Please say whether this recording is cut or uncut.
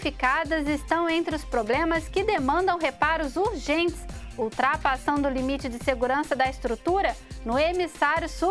uncut